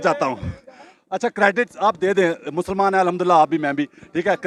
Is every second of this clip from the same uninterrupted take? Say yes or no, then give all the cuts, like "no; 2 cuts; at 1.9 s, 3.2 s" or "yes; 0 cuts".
yes; 0 cuts